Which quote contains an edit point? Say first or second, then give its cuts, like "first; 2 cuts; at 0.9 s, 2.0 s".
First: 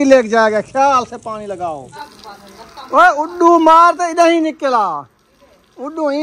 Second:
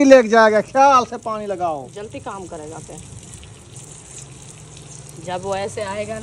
first; 1 cut; at 2.0 s